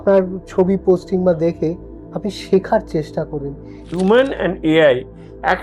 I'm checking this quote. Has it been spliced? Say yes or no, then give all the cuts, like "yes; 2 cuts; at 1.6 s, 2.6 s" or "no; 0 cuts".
yes; 1 cut; at 3.8 s